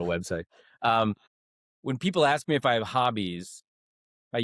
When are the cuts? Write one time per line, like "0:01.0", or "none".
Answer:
0:01.3